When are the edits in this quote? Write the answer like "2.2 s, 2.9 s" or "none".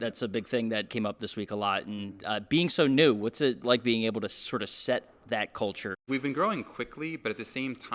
0.9 s, 3.6 s, 6.0 s